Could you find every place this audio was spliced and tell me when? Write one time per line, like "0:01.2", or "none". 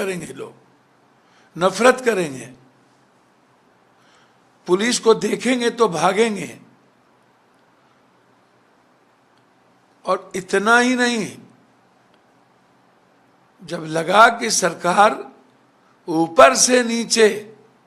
none